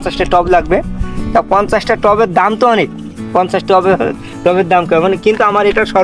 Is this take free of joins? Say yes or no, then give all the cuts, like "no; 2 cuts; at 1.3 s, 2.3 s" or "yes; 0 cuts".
yes; 0 cuts